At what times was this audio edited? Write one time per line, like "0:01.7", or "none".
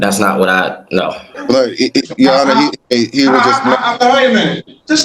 0:01.3
0:02.8